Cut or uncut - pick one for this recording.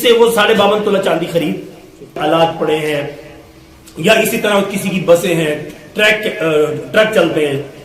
cut